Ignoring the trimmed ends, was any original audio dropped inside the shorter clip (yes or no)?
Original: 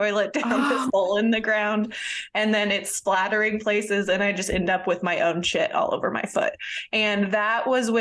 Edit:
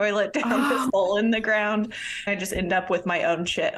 yes